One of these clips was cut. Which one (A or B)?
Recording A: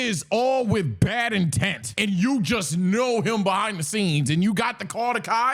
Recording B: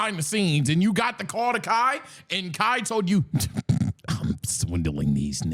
A